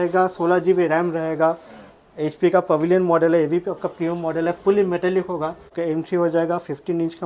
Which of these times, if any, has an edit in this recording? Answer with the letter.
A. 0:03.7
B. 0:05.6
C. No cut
B